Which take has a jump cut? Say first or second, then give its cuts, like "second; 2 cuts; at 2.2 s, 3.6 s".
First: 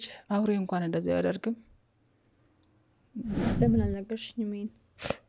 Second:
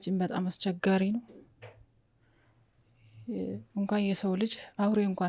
first; 1 cut; at 3.4 s